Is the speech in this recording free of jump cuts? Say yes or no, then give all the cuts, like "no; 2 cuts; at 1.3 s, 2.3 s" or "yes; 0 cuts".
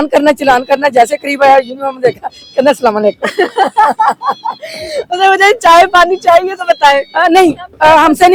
yes; 0 cuts